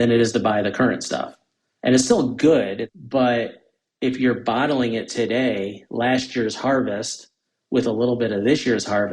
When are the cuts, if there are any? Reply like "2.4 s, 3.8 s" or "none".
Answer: 2.9 s